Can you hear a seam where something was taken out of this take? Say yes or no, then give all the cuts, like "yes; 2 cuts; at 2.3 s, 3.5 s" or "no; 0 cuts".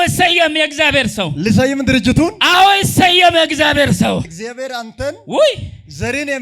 no; 0 cuts